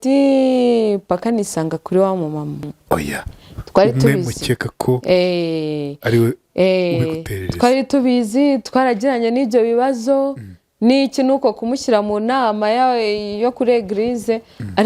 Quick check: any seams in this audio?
yes; 1 cut; at 2.7 s

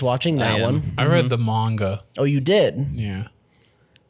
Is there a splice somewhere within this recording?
no; 0 cuts

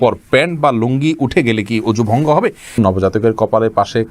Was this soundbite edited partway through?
yes; 1 cut; at 2.8 s

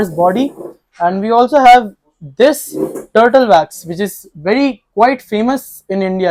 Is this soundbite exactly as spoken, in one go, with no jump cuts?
yes; 0 cuts

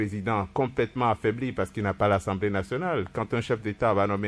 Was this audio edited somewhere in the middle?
no; 0 cuts

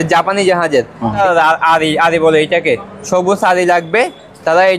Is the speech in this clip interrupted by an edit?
yes; 1 cut; at 1.2 s

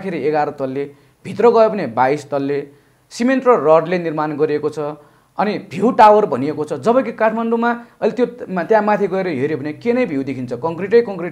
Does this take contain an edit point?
no; 0 cuts

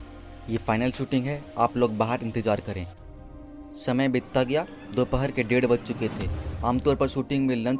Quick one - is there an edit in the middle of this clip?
no; 0 cuts

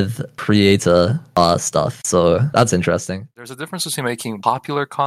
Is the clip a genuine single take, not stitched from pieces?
no; 1 cut; at 3.2 s

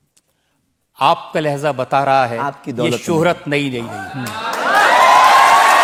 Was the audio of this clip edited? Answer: no; 0 cuts

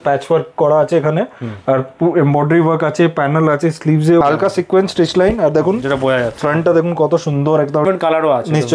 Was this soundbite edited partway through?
yes; 2 cuts; at 4.2 s, 7.9 s

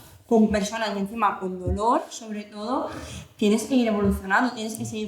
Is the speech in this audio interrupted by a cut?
no; 0 cuts

